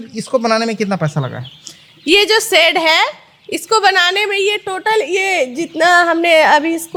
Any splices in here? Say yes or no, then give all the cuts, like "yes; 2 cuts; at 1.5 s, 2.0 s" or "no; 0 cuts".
no; 0 cuts